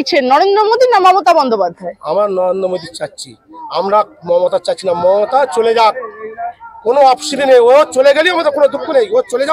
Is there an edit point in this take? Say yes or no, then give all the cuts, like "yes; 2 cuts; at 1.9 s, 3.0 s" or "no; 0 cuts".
no; 0 cuts